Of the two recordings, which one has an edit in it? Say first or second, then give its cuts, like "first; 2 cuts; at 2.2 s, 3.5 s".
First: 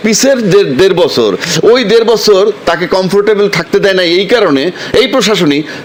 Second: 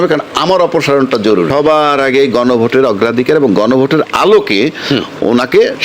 second; 1 cut; at 1.5 s